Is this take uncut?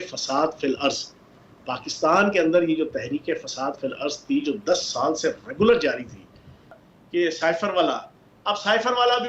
no; 1 cut; at 6.8 s

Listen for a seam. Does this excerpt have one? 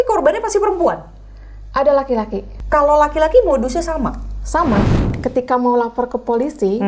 yes; 2 cuts; at 2.5 s, 5.1 s

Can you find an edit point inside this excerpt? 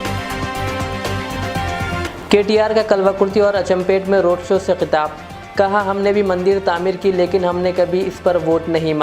no; 0 cuts

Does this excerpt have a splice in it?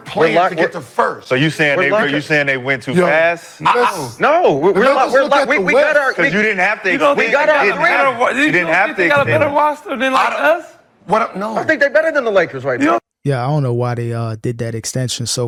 no; 0 cuts

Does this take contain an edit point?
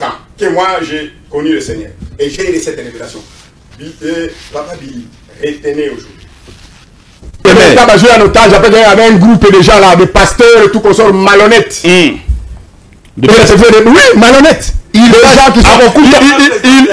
yes; 1 cut; at 7.4 s

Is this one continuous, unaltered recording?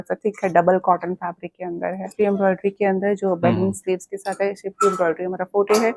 no; 1 cut; at 2.1 s

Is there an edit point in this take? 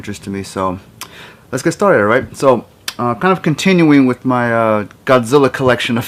no; 0 cuts

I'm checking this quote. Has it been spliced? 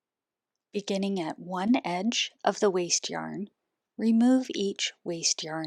no; 0 cuts

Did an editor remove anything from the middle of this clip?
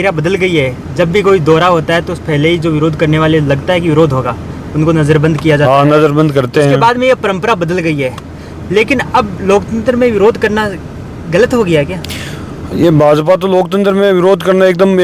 no; 0 cuts

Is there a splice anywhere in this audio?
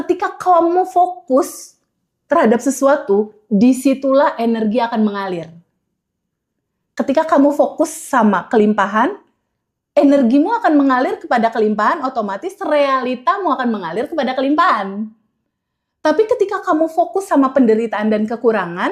no; 0 cuts

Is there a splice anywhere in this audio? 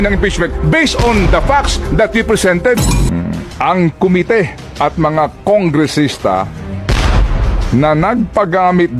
yes; 1 cut; at 3.0 s

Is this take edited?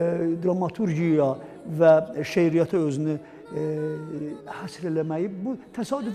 no; 0 cuts

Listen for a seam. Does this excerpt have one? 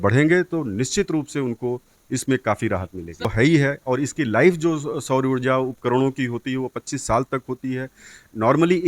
yes; 1 cut; at 3.2 s

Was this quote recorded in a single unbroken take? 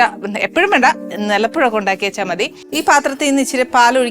no; 1 cut; at 2.6 s

